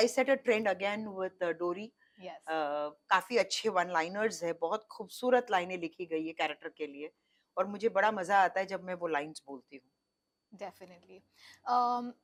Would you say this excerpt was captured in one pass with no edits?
yes; 0 cuts

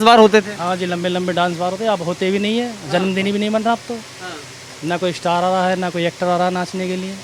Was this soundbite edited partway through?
no; 0 cuts

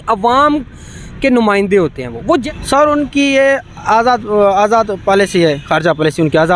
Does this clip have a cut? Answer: yes; 1 cut; at 2.3 s

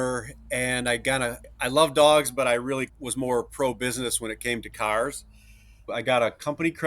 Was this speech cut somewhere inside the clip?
yes; 3 cuts; at 1.5 s, 2.9 s, 5.9 s

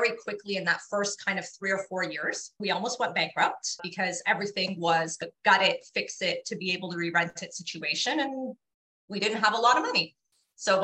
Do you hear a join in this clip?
no; 0 cuts

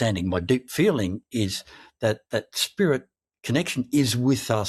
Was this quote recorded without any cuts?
yes; 0 cuts

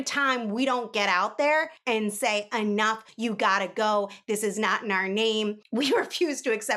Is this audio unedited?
yes; 0 cuts

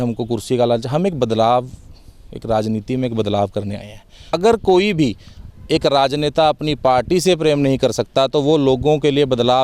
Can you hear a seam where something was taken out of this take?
yes; 1 cut; at 4.3 s

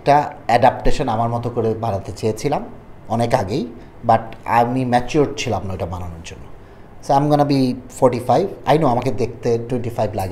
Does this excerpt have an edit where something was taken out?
no; 0 cuts

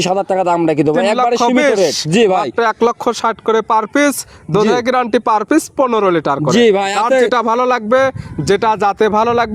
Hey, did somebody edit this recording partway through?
no; 0 cuts

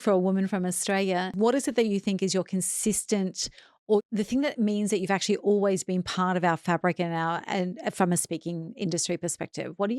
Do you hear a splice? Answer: yes; 2 cuts; at 1.3 s, 4.0 s

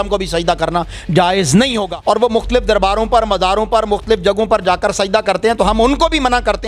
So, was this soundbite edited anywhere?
yes; 1 cut; at 1.9 s

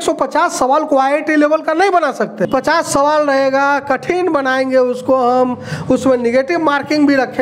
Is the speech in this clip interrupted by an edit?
yes; 1 cut; at 2.5 s

